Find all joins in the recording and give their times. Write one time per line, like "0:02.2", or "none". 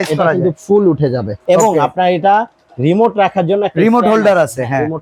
0:01.3